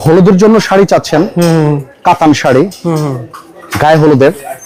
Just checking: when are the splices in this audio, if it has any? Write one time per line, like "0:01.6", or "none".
none